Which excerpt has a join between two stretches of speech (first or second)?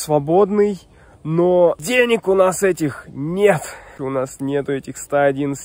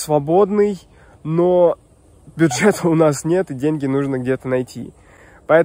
first